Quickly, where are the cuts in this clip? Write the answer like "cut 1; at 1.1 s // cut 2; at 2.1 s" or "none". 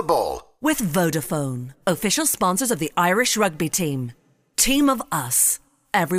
none

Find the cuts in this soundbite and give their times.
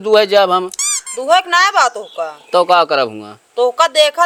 none

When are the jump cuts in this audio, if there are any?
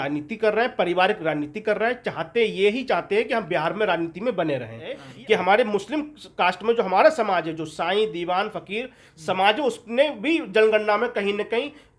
cut 1; at 5.1 s

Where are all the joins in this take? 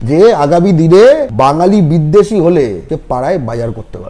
cut 1; at 1.3 s // cut 2; at 2.8 s

